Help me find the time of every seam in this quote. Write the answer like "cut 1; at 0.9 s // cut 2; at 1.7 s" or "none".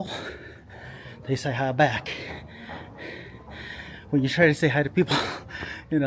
none